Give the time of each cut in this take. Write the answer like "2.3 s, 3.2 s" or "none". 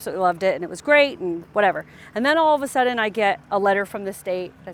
none